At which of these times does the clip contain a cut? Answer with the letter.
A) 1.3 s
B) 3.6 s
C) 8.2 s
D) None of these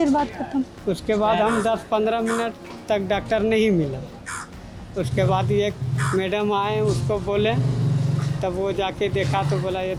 D